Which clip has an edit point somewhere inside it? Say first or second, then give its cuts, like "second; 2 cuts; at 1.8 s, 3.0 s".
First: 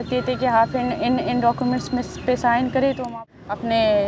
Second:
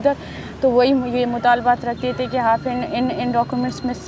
first; 1 cut; at 3.1 s